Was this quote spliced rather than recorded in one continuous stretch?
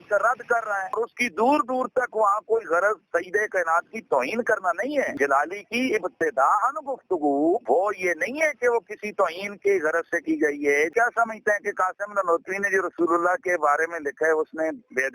yes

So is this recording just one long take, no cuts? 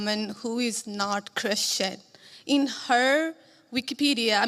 yes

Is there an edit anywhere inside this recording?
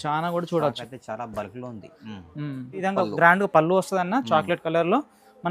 yes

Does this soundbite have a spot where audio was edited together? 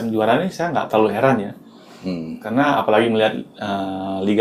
no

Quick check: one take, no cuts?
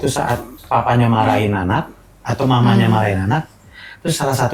yes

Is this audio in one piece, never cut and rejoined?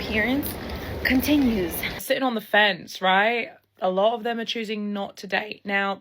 no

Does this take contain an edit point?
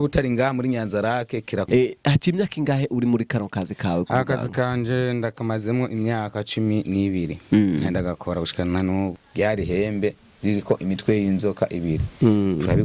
yes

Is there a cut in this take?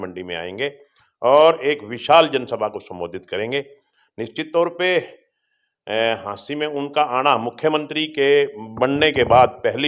no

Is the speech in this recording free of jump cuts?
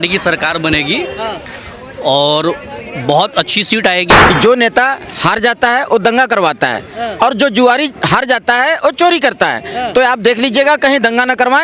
no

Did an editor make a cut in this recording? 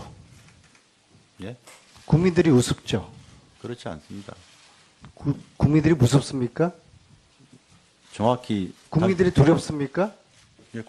yes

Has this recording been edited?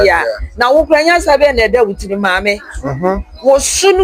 no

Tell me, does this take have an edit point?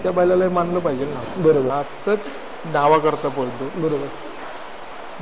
yes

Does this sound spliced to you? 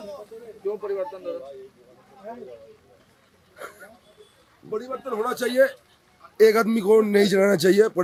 no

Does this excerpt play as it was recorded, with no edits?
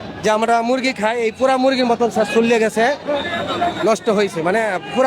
yes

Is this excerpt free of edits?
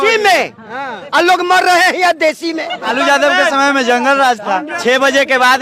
no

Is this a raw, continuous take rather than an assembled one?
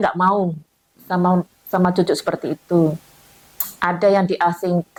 yes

